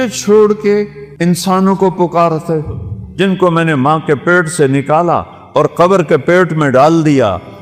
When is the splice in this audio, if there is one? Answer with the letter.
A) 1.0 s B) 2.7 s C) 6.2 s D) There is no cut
A